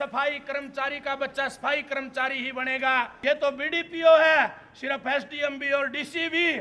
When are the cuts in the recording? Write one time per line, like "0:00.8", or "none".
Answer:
0:03.1